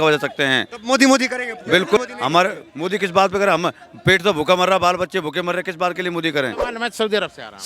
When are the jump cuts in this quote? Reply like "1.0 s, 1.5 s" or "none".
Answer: 2.0 s, 6.7 s